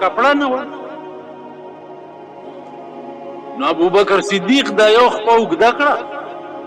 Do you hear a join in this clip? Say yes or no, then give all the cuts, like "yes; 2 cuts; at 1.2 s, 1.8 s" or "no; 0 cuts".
no; 0 cuts